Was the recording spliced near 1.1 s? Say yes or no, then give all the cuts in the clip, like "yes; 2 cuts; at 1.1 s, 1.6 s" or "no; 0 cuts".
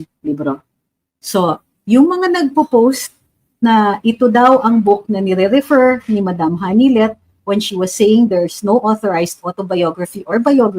yes; 1 cut; at 1.1 s